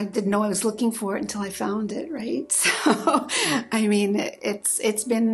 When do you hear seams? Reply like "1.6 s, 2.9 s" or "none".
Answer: none